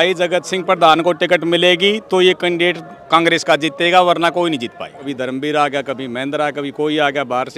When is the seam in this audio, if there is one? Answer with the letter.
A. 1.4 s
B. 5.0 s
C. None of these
B